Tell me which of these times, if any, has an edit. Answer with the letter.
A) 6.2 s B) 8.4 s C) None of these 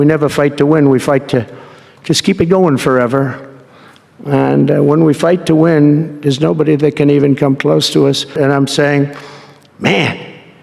B